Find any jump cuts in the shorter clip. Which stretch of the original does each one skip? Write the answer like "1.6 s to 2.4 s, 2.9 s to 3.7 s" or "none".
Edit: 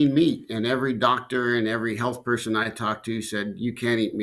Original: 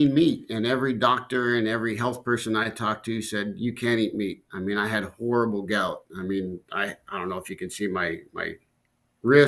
none